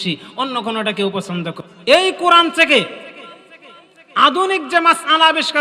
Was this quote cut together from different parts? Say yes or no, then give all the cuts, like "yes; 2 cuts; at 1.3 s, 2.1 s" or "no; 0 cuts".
yes; 1 cut; at 1.6 s